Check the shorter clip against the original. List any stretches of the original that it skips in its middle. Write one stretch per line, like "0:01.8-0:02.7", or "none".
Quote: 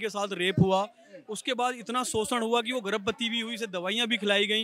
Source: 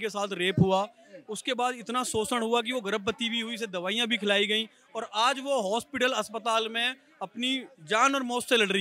none